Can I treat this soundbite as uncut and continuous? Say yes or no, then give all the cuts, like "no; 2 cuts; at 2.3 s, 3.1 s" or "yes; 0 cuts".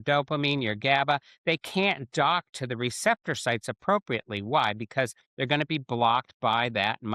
yes; 0 cuts